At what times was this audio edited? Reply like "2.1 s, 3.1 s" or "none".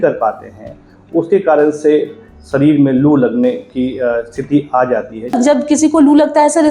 5.2 s